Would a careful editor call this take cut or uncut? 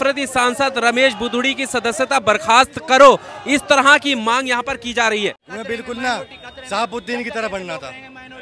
cut